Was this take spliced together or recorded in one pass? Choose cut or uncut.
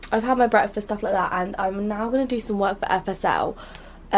cut